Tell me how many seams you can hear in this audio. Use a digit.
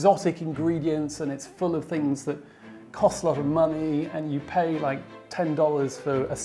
0